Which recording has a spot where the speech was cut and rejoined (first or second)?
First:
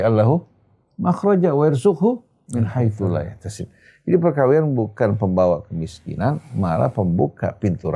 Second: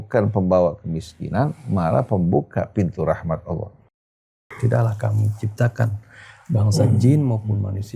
second